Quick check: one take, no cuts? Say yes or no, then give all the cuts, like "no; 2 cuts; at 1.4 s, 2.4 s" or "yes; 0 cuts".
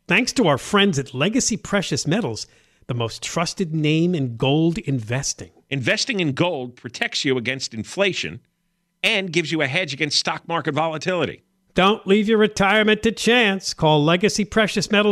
yes; 0 cuts